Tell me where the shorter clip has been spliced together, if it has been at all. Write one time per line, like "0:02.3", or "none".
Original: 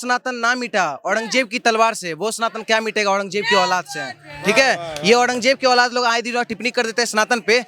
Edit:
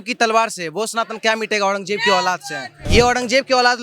0:02.8